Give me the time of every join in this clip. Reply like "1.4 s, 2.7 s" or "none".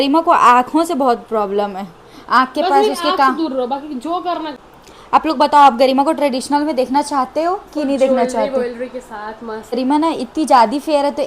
4.5 s, 9.8 s